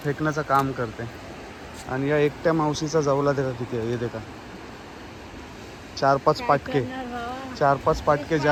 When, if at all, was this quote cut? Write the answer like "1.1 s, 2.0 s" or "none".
none